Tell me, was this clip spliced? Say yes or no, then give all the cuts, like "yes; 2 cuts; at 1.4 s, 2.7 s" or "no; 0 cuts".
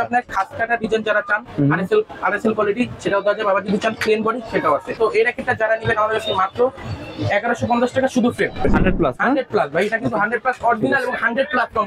yes; 2 cuts; at 5.0 s, 8.6 s